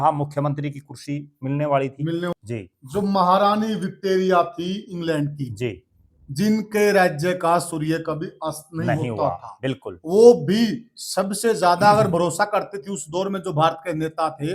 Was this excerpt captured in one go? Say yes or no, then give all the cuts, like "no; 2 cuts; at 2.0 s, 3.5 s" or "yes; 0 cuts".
no; 1 cut; at 2.3 s